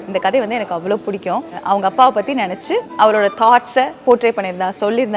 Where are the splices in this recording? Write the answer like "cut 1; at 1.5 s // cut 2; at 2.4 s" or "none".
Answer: cut 1; at 1.5 s // cut 2; at 2.9 s